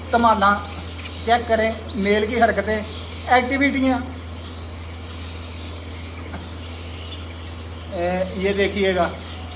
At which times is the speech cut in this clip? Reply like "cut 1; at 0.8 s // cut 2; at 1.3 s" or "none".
none